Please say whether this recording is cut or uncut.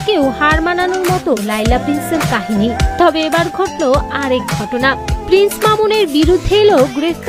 uncut